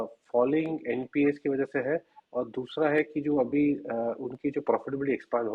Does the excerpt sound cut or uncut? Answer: uncut